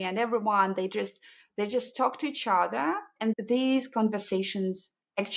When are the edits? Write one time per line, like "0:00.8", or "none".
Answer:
0:03.3